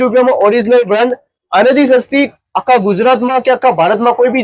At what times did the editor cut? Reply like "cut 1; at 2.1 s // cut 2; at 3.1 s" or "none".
none